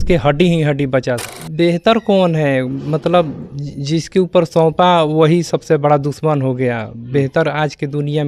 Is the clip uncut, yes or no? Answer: no